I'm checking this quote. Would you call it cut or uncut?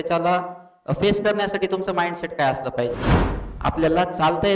cut